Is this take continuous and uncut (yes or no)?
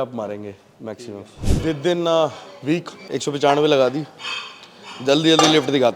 no